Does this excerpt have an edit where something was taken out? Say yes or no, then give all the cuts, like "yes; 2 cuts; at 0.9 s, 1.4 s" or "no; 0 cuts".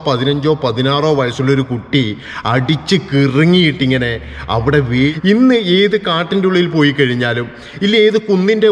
yes; 1 cut; at 5.1 s